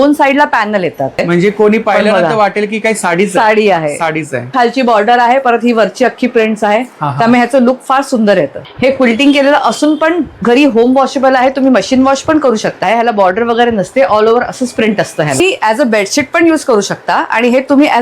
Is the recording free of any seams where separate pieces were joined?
no; 5 cuts; at 1.2 s, 4.5 s, 8.6 s, 12.8 s, 15.4 s

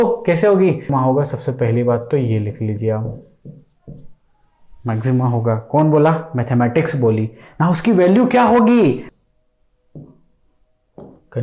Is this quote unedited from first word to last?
no; 2 cuts; at 0.9 s, 9.1 s

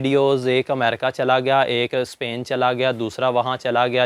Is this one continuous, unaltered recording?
yes; 0 cuts

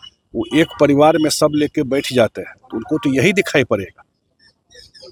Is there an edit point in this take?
no; 0 cuts

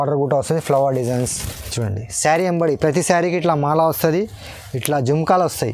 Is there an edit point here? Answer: yes; 1 cut; at 1.8 s

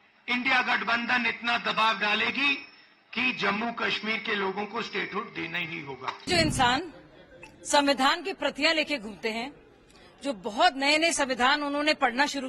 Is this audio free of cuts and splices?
no; 1 cut; at 6.2 s

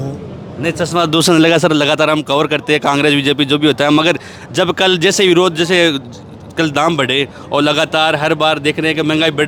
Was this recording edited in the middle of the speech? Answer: no; 0 cuts

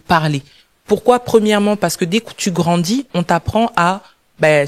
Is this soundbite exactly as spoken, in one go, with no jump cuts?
yes; 0 cuts

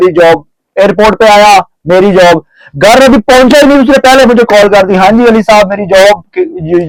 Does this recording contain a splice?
no; 0 cuts

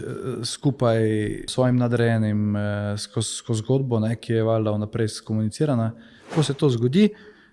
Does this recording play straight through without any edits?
no; 2 cuts; at 1.5 s, 6.3 s

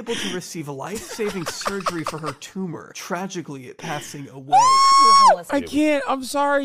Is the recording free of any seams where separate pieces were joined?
no; 1 cut; at 5.4 s

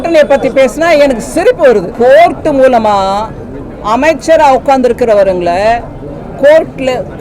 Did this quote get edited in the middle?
yes; 1 cut; at 1.9 s

